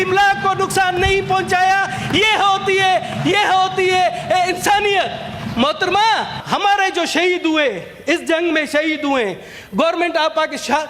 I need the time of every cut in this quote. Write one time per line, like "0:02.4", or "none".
0:06.4